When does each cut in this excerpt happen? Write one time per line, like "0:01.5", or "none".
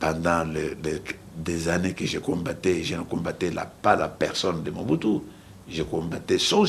none